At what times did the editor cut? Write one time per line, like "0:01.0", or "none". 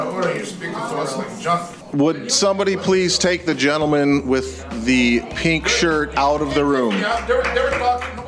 0:01.8